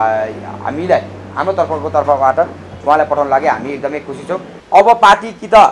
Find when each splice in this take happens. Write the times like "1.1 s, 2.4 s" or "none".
4.5 s